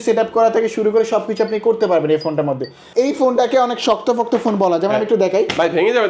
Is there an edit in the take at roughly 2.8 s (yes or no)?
yes